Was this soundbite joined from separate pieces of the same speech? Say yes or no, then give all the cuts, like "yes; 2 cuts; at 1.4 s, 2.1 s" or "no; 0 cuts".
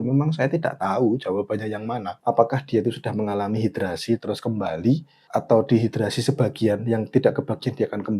yes; 2 cuts; at 2.1 s, 5.1 s